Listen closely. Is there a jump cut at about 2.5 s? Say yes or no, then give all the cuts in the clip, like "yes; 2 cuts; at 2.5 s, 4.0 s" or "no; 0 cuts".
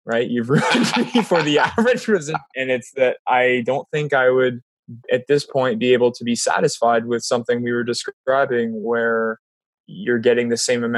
yes; 1 cut; at 2.5 s